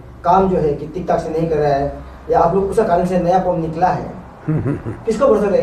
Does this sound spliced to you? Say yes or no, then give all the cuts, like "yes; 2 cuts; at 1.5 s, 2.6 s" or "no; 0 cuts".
no; 0 cuts